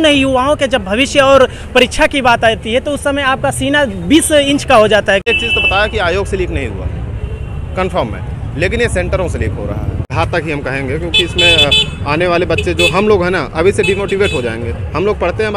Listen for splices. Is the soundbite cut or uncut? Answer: cut